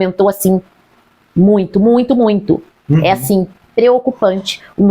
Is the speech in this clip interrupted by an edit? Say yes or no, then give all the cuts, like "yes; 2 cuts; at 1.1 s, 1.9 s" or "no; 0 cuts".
no; 0 cuts